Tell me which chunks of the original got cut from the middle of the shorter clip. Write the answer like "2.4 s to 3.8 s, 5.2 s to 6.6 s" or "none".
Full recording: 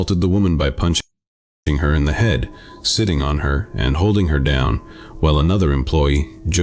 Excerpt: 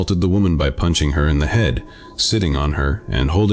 1.0 s to 1.6 s